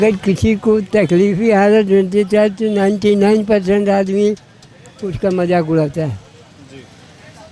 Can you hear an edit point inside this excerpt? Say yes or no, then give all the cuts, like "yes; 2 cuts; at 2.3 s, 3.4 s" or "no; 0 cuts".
no; 0 cuts